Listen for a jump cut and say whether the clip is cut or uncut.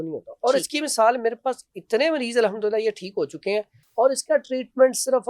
cut